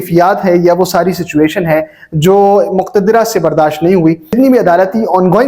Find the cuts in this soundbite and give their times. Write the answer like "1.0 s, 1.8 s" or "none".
4.3 s